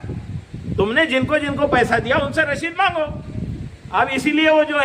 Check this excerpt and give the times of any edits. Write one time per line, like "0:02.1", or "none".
none